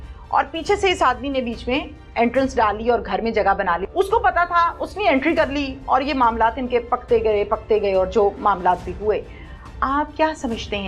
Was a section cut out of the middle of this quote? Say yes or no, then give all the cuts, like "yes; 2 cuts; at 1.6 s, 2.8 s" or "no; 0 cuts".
yes; 1 cut; at 3.8 s